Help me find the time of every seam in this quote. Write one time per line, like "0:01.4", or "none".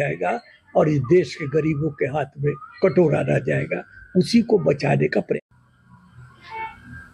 0:05.4